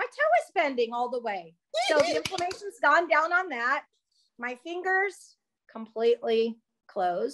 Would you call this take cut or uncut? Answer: uncut